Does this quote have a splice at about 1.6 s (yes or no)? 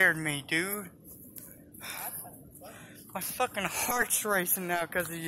yes